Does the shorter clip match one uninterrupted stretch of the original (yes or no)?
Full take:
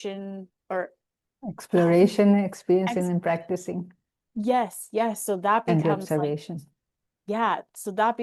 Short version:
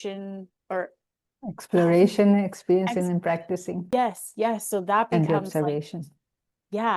no